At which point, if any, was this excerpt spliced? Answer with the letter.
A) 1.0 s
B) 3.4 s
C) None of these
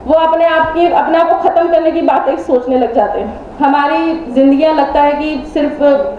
B